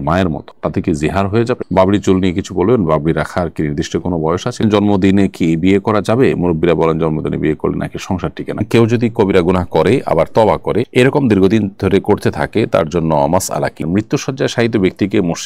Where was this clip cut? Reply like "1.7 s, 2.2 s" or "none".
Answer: 1.6 s, 4.6 s, 8.6 s, 13.8 s